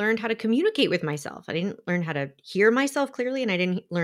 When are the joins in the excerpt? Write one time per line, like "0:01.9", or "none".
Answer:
none